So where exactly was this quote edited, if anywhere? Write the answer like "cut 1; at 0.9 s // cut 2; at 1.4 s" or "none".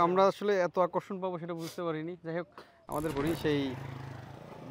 cut 1; at 3.1 s